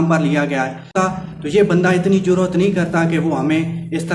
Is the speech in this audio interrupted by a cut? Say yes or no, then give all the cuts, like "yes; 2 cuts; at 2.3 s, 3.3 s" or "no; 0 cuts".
yes; 1 cut; at 0.9 s